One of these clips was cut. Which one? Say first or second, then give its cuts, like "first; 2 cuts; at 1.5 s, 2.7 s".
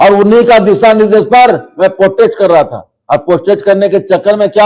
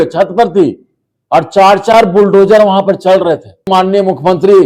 second; 1 cut; at 3.7 s